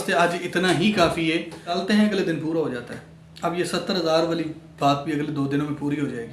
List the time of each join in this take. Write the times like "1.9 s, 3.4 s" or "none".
1.7 s